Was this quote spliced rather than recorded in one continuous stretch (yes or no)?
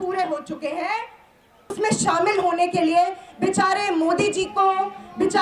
yes